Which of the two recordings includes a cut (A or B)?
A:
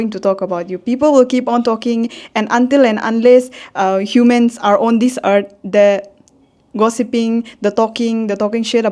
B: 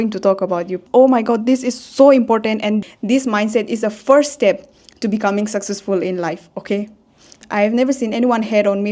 B